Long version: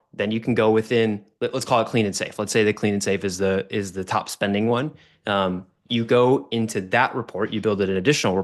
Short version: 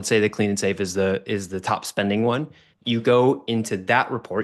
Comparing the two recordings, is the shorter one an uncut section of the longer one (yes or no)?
no